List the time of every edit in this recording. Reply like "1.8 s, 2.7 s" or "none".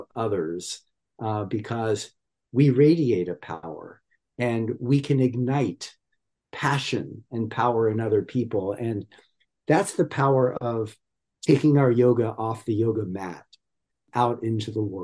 14.0 s